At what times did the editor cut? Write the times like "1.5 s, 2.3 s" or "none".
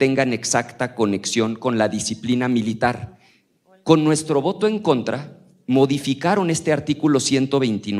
none